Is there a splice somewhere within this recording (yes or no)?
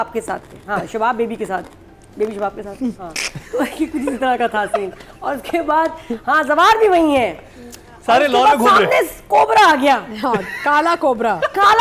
no